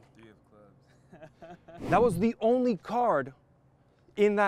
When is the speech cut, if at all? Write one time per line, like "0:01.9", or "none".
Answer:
none